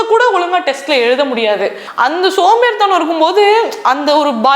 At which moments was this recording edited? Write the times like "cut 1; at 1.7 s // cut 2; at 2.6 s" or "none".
cut 1; at 1.8 s